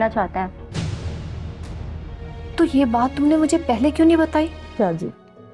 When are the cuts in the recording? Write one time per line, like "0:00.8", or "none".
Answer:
0:04.6